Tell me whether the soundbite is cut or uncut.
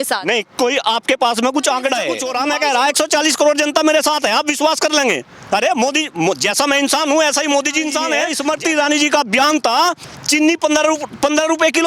cut